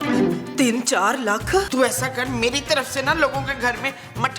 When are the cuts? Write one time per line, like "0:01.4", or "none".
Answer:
0:01.7